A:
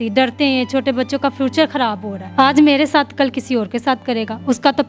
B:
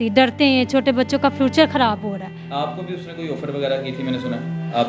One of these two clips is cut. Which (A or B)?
A